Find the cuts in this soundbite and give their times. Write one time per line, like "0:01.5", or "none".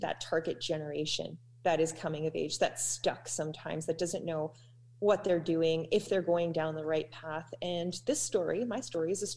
none